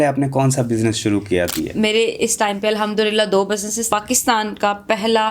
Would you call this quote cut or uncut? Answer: cut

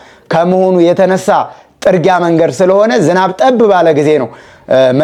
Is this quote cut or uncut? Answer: uncut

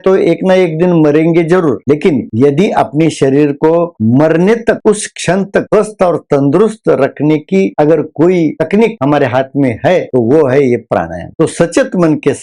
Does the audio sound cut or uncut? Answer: uncut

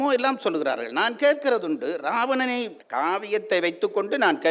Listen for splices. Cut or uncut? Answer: cut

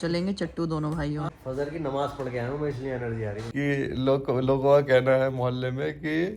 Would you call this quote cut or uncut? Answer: cut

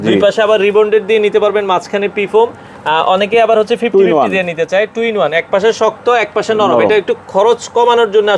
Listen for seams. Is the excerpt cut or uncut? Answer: uncut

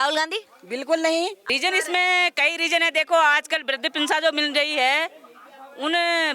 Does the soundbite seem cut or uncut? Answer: cut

